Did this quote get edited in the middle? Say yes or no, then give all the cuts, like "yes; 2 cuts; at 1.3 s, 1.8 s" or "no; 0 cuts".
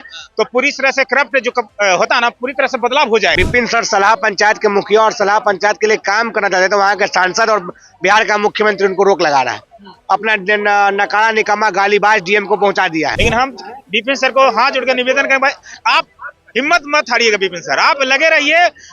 yes; 2 cuts; at 3.3 s, 13.2 s